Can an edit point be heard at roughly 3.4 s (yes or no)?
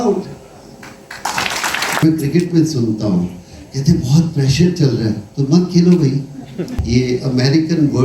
no